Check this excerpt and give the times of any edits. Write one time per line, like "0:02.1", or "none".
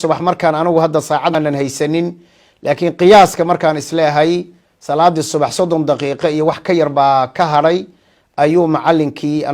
0:01.3